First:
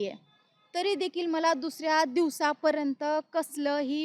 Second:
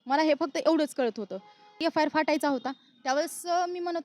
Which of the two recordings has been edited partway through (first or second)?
second